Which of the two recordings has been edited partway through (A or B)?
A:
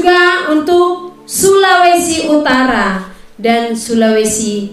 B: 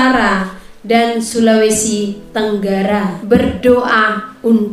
B